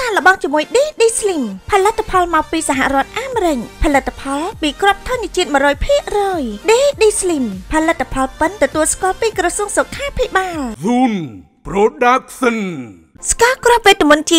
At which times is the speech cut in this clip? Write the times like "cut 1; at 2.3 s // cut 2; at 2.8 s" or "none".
cut 1; at 10.7 s // cut 2; at 13.2 s